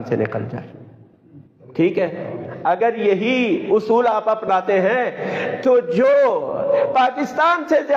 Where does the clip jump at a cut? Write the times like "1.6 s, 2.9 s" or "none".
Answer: none